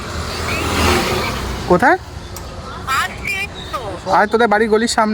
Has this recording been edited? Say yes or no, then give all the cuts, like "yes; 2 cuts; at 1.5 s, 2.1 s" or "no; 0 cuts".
no; 0 cuts